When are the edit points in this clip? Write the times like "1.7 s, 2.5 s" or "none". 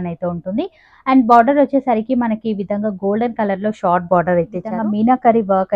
4.7 s